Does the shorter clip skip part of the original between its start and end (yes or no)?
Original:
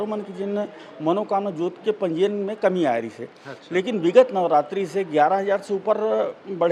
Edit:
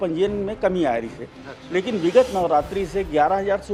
no